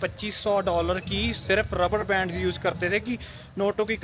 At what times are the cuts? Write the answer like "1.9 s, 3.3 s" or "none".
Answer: none